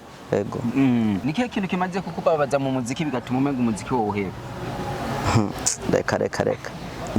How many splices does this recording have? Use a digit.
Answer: 1